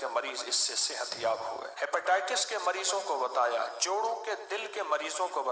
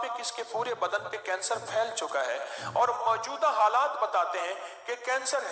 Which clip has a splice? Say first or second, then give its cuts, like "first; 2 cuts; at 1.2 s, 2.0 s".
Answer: first; 1 cut; at 1.7 s